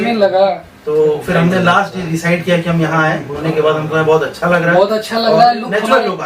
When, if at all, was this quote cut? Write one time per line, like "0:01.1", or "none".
0:03.4